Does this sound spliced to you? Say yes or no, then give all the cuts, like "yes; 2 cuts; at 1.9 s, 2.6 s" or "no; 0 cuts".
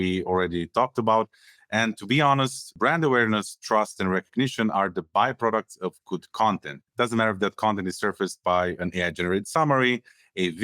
yes; 2 cuts; at 2.7 s, 6.8 s